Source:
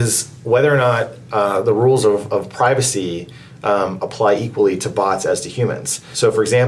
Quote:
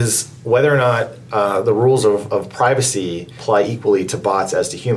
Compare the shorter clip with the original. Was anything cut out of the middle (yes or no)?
yes